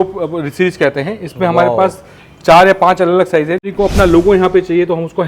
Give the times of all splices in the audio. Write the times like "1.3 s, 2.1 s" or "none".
3.6 s